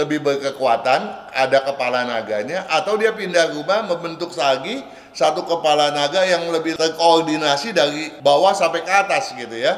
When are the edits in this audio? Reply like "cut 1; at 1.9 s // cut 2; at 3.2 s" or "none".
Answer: cut 1; at 6.7 s // cut 2; at 8.1 s